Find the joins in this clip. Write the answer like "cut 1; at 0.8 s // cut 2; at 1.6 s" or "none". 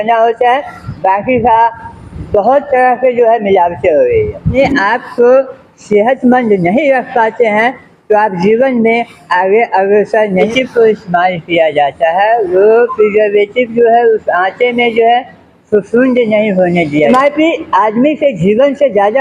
cut 1; at 4.6 s // cut 2; at 10.5 s // cut 3; at 17.1 s